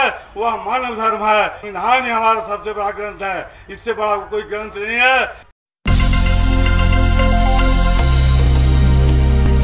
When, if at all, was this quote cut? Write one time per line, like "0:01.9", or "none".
0:01.6
0:05.4